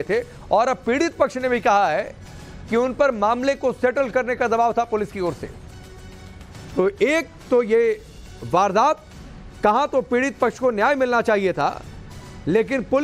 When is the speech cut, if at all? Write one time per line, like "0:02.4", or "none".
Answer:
none